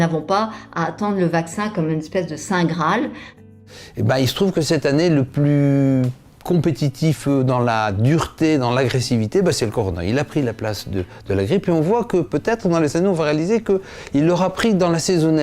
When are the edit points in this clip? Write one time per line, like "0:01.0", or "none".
0:03.5